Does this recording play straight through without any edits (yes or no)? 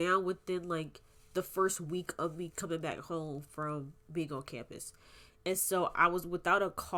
yes